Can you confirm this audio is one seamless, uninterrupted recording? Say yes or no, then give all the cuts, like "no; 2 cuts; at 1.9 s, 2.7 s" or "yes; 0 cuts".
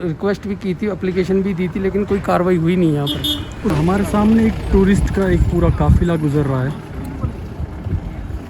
no; 1 cut; at 3.7 s